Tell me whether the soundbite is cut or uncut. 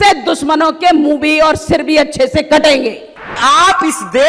cut